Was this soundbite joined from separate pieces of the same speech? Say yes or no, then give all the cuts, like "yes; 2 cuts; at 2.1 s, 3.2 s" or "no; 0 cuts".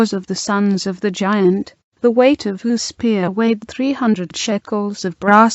yes; 1 cut; at 1.4 s